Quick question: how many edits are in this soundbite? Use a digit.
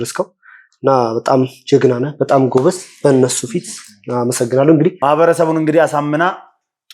1